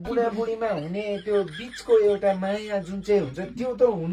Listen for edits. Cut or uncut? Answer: uncut